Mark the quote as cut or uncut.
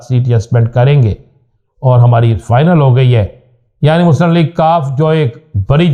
uncut